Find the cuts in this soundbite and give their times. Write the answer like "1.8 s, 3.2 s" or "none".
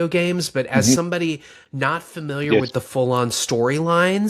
none